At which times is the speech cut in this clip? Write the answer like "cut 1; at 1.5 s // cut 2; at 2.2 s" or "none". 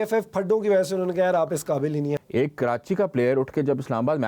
cut 1; at 2.2 s